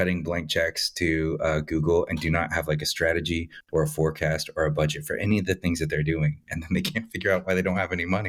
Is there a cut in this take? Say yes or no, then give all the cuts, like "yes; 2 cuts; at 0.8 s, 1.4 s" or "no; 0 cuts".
no; 0 cuts